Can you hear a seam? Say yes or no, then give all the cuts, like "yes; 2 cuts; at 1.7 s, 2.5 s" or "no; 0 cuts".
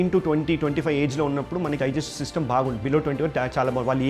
yes; 1 cut; at 1.8 s